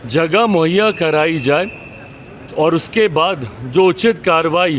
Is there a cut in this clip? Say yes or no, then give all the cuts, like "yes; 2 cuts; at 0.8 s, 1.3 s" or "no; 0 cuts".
no; 0 cuts